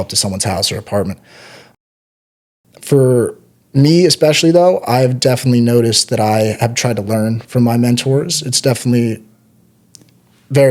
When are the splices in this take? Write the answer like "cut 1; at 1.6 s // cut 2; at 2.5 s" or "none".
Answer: none